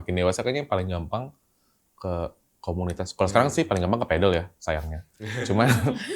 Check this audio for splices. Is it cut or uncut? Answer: uncut